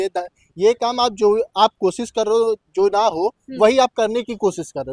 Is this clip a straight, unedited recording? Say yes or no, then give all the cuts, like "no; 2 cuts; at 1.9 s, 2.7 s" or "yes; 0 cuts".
yes; 0 cuts